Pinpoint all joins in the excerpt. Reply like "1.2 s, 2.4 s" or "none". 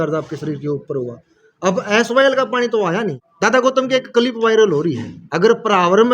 3.2 s, 5.1 s